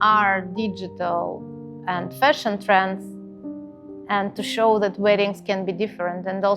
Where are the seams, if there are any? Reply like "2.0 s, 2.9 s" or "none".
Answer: none